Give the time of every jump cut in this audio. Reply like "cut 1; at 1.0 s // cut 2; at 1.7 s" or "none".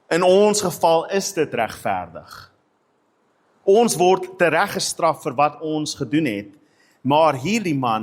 none